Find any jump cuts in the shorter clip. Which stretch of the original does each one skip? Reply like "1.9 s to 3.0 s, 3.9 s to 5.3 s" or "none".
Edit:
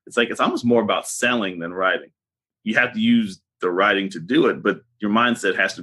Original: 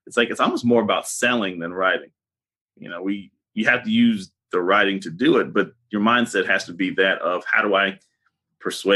2.5 s to 3.4 s